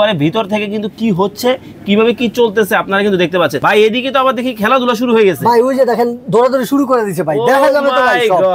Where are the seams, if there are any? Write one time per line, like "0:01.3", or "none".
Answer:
0:03.6